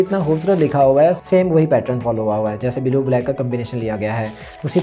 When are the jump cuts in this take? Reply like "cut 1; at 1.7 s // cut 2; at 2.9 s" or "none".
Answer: cut 1; at 1.2 s